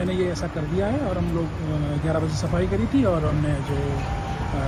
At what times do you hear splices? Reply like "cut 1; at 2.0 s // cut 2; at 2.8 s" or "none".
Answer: none